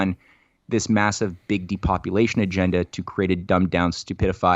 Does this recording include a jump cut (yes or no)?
no